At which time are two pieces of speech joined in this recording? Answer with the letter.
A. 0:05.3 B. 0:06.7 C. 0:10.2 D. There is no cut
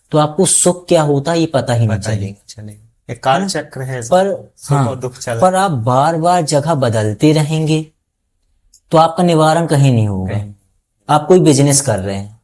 D